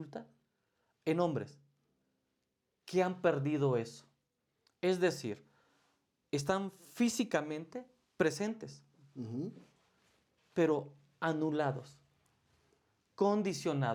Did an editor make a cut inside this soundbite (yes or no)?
no